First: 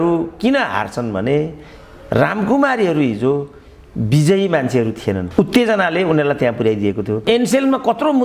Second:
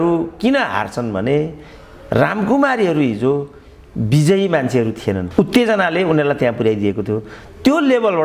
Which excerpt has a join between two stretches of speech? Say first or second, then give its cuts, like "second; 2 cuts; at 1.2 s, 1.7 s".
first; 1 cut; at 7.2 s